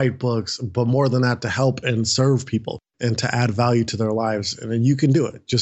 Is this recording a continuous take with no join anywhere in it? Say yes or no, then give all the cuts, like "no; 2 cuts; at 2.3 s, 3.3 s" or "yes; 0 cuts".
yes; 0 cuts